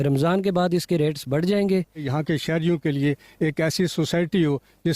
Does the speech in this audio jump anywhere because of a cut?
yes; 1 cut; at 2.1 s

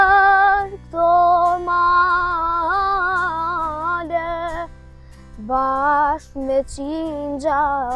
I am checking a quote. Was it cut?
no; 0 cuts

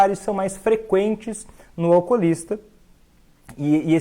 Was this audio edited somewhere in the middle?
no; 0 cuts

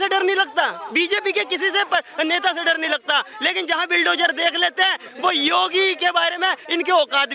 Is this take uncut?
yes; 0 cuts

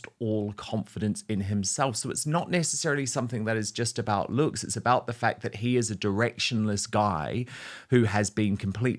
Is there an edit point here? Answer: no; 0 cuts

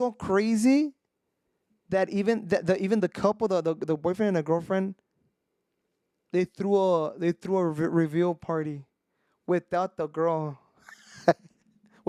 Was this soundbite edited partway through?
no; 0 cuts

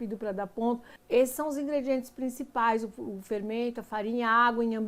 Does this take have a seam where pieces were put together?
yes; 1 cut; at 0.9 s

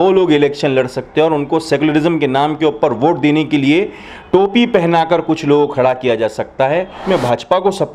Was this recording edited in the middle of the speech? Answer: yes; 1 cut; at 7.0 s

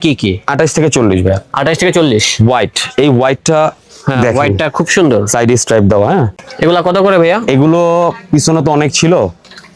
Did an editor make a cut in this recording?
yes; 1 cut; at 6.4 s

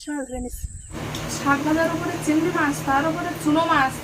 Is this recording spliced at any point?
yes; 1 cut; at 0.9 s

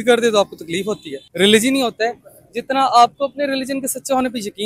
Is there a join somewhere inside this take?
yes; 1 cut; at 1.2 s

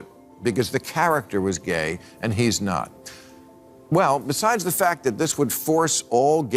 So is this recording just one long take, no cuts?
yes; 0 cuts

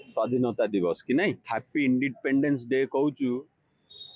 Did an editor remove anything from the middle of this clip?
yes; 1 cut; at 1.5 s

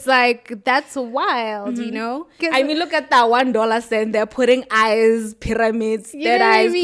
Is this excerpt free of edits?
no; 1 cut; at 2.4 s

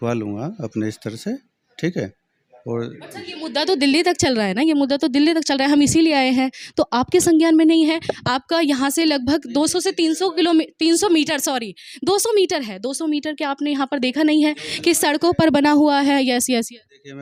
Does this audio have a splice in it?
no; 0 cuts

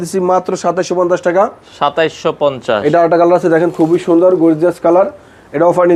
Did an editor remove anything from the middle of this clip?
no; 0 cuts

